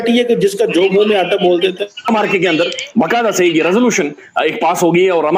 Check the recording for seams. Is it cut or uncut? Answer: cut